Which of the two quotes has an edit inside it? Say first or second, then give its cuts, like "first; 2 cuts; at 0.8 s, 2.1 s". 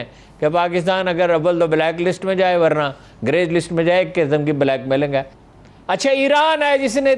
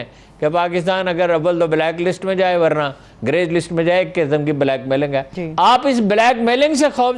first; 1 cut; at 5.4 s